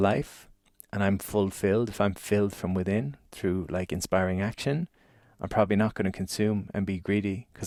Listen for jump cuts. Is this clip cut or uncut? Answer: uncut